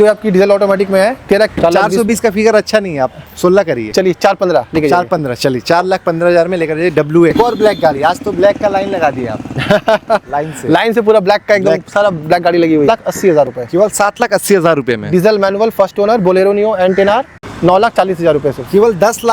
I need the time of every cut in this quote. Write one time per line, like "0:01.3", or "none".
0:01.5
0:07.3
0:12.9
0:17.4